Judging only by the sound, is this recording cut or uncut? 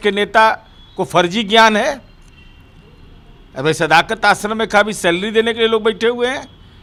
uncut